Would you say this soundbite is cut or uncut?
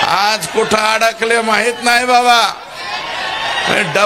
uncut